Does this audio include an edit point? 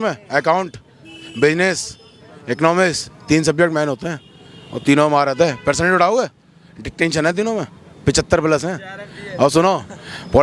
no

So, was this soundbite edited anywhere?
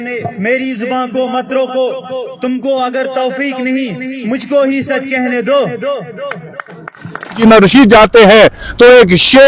yes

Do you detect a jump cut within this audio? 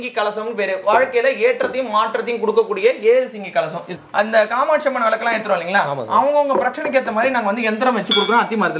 yes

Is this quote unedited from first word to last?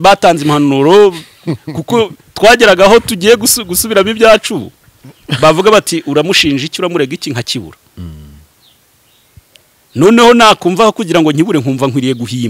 yes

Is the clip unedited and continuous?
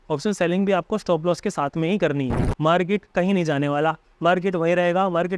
no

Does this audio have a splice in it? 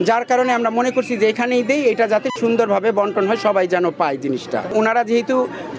yes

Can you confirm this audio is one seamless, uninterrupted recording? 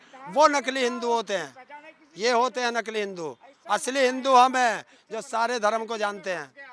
yes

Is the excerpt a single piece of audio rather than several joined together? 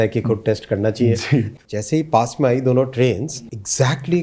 no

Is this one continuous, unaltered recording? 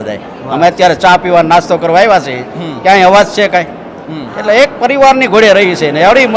yes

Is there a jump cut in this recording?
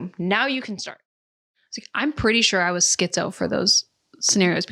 yes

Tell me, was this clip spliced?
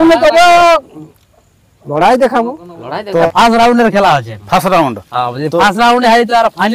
yes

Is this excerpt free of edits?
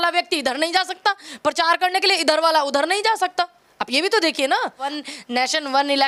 yes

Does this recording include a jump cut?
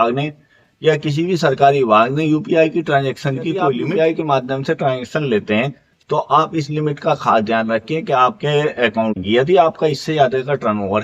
yes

